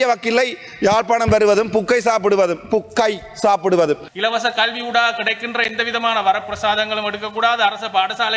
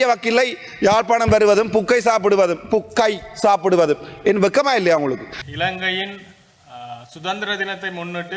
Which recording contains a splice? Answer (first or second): first